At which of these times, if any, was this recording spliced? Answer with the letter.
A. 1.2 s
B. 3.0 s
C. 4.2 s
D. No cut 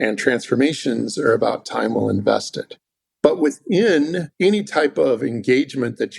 C